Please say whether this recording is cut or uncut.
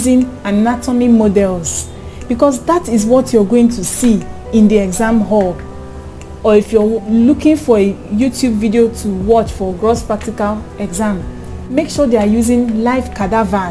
uncut